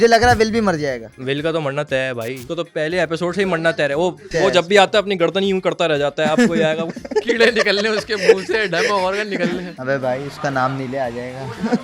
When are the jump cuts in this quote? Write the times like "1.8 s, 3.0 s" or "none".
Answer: 1.2 s, 2.4 s, 9.7 s